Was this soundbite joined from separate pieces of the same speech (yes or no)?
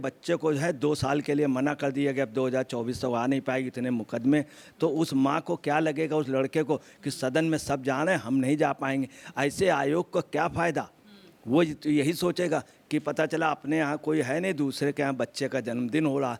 no